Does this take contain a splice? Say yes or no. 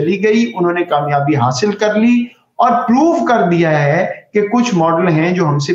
no